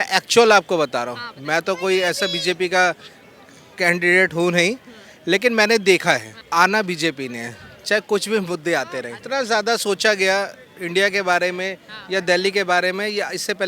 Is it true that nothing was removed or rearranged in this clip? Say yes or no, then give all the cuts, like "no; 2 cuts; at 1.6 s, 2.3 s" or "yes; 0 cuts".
no; 2 cuts; at 6.3 s, 9.2 s